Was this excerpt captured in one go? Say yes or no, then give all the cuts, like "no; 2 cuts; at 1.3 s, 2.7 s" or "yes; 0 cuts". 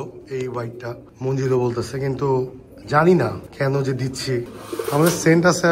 no; 1 cut; at 4.5 s